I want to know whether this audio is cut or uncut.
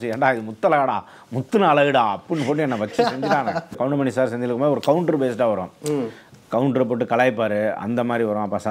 cut